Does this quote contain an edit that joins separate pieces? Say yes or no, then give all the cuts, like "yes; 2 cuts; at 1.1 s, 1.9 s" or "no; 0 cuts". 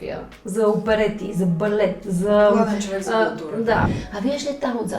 yes; 1 cut; at 3.9 s